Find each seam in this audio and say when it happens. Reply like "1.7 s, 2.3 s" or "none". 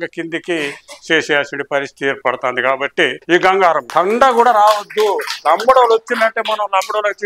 3.2 s, 3.8 s

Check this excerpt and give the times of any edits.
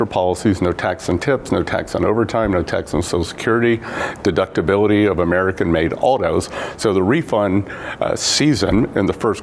2.3 s, 4.1 s

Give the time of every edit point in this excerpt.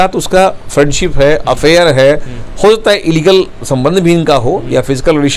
none

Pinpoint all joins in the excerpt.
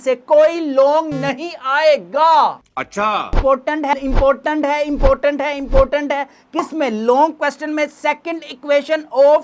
3.3 s

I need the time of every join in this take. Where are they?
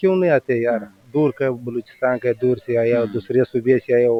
none

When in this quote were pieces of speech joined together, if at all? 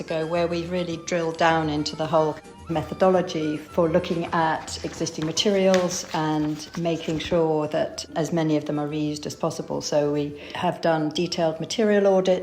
2.5 s, 10.5 s

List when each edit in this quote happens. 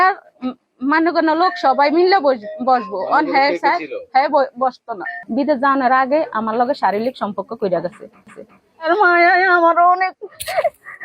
5.2 s, 8.4 s

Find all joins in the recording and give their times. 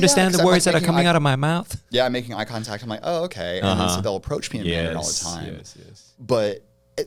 none

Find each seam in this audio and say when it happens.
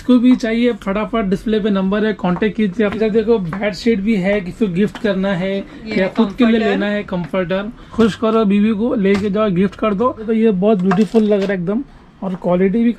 3.0 s, 7.8 s, 10.3 s

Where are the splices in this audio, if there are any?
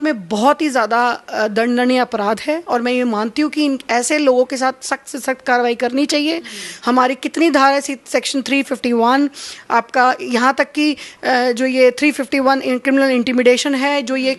none

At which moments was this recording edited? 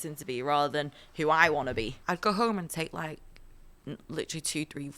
2.0 s

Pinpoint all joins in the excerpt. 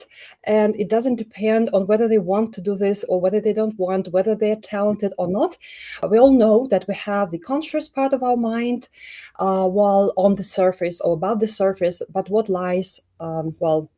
6.0 s

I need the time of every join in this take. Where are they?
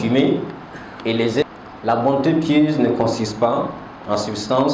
1.4 s

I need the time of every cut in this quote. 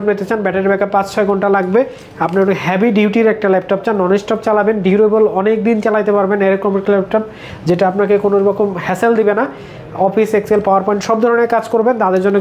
none

